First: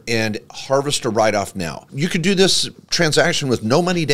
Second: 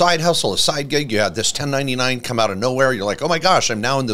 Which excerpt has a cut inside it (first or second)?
first